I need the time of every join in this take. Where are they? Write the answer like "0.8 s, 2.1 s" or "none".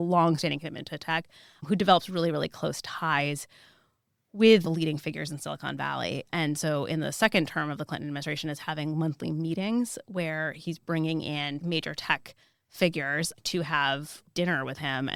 none